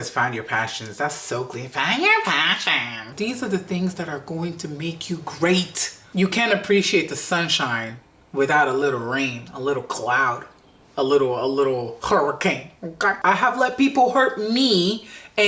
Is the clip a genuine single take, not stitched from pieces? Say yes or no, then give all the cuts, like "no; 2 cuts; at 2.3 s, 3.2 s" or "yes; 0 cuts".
no; 3 cuts; at 3.0 s, 6.1 s, 13.2 s